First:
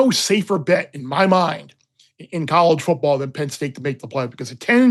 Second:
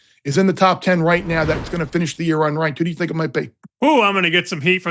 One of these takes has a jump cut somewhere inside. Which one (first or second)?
second